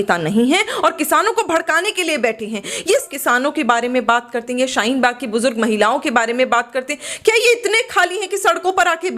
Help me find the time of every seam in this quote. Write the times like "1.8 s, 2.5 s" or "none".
3.1 s